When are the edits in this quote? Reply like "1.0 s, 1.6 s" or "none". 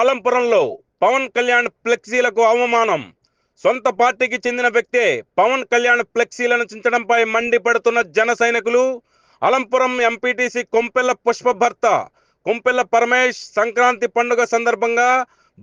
none

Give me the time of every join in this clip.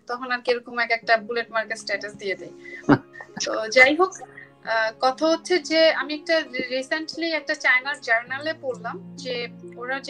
none

